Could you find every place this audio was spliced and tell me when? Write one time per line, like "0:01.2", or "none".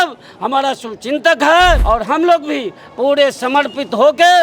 0:01.8